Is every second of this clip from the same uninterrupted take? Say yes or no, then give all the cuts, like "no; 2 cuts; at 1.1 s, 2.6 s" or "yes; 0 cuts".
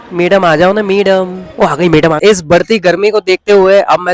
no; 1 cut; at 2.2 s